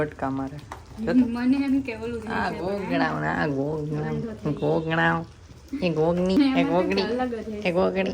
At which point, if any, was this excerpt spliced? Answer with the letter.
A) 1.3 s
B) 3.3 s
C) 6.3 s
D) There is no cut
C